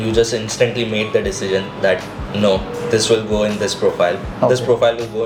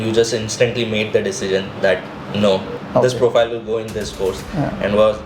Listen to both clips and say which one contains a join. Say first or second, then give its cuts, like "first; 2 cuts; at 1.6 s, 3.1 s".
second; 1 cut; at 2.8 s